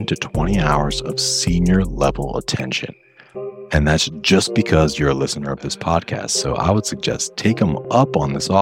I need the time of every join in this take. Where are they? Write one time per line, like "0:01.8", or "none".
none

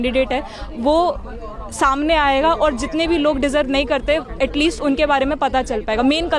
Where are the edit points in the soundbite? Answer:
none

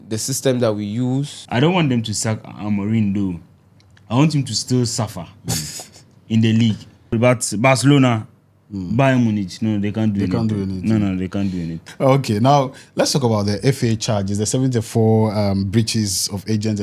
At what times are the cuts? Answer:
0:01.4
0:07.1
0:11.8

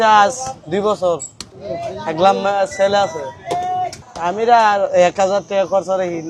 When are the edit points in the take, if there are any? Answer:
none

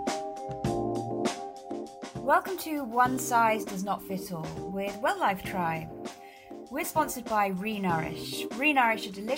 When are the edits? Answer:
0:02.1

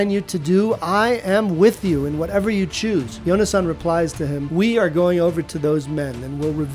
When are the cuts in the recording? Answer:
0:03.1
0:04.4

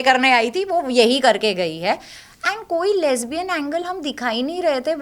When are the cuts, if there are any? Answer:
none

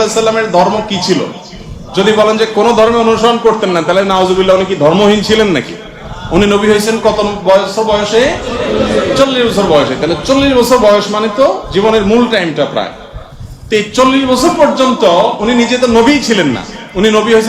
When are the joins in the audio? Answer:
none

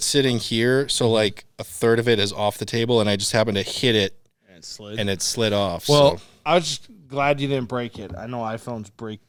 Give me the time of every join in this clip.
none

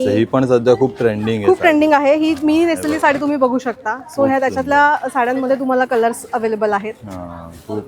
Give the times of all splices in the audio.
none

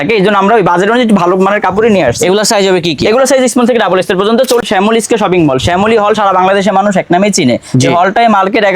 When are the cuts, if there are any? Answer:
0:04.6

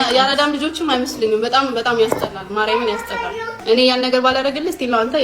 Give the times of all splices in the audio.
0:03.5

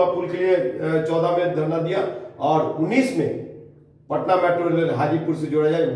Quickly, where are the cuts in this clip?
none

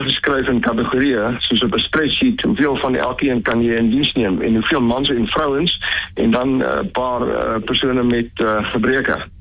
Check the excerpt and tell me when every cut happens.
none

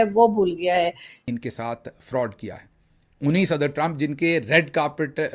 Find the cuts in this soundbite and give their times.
0:01.2

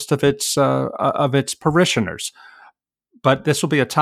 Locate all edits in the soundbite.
none

